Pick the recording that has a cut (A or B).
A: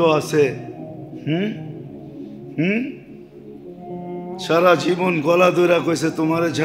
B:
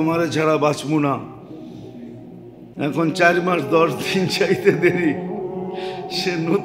A